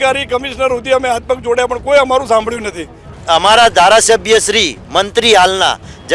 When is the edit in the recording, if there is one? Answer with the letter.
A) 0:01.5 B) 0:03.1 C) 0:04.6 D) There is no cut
B